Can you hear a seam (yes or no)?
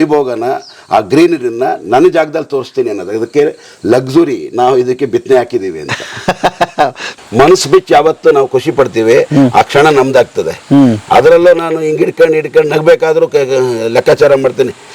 yes